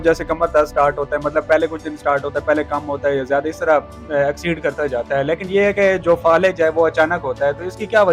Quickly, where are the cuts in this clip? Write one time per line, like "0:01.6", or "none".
none